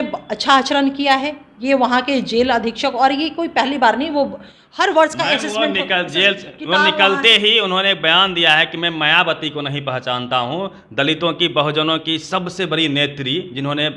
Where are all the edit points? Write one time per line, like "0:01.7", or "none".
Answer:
none